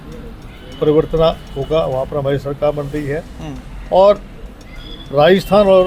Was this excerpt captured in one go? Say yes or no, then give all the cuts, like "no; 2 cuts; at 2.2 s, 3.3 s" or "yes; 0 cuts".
yes; 0 cuts